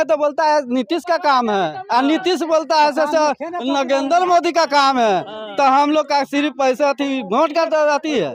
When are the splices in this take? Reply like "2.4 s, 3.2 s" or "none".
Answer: none